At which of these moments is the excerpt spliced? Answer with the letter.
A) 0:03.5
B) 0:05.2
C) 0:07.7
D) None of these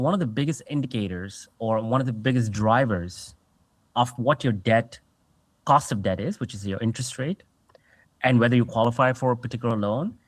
D